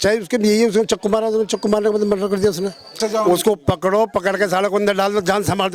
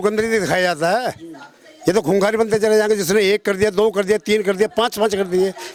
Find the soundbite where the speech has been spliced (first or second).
first